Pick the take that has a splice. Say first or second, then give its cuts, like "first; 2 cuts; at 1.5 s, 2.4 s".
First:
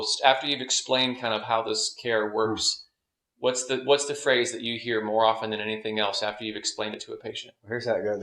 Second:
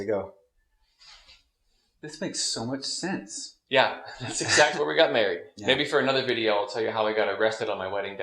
second; 1 cut; at 4.7 s